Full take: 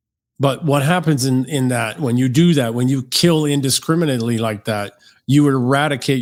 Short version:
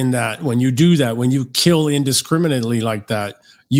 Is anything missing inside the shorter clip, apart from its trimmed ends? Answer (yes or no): no